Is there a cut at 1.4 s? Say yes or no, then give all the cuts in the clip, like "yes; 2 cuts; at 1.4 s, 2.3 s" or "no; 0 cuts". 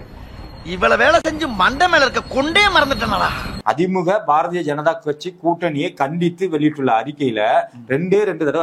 no; 1 cut; at 3.5 s